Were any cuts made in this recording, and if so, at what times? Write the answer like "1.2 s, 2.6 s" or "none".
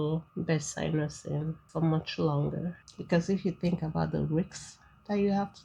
2.8 s